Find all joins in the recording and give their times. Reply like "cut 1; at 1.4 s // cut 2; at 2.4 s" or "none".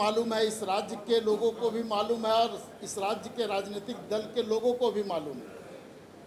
none